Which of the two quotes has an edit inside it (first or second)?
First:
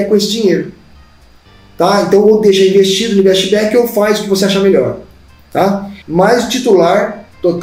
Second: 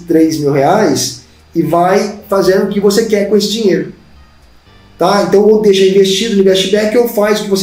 first